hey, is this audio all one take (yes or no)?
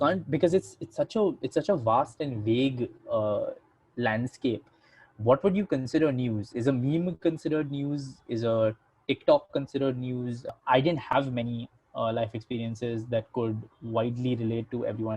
no